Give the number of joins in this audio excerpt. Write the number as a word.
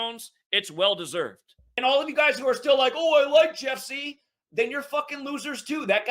one